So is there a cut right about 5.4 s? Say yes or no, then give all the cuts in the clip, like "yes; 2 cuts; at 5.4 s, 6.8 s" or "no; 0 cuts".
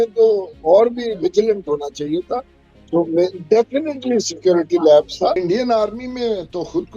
yes; 1 cut; at 5.4 s